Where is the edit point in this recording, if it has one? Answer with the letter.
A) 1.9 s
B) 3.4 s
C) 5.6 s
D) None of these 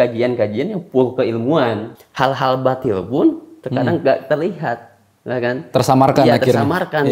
A